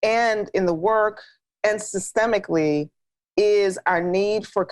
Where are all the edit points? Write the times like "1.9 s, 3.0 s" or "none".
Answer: none